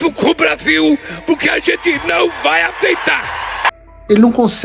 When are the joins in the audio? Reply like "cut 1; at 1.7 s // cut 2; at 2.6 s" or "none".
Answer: cut 1; at 3.7 s